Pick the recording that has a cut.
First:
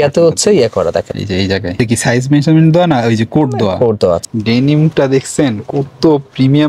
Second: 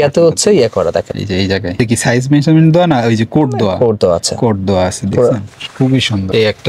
first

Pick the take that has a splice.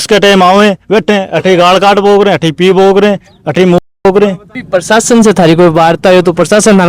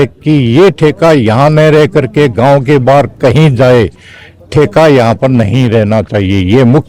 first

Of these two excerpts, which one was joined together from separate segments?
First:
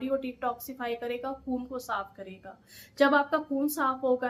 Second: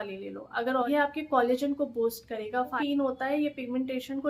second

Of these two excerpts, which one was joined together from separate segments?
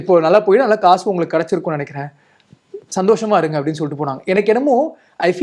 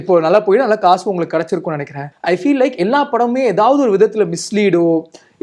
second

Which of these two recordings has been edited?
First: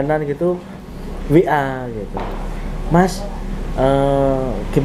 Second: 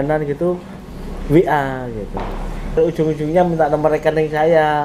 second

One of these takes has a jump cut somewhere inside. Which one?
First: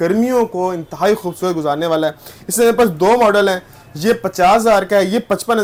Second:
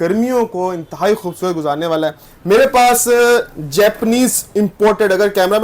second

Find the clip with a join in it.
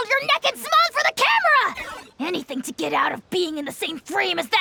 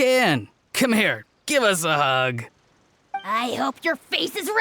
second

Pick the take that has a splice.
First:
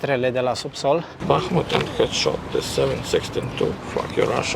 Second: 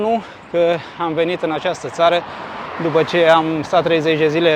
first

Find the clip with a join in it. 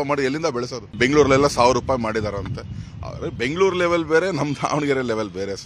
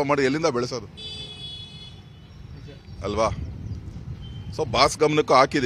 first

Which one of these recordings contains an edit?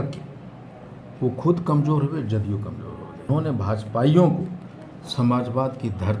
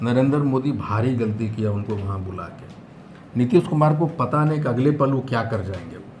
first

